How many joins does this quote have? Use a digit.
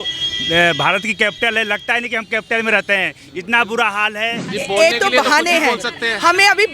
1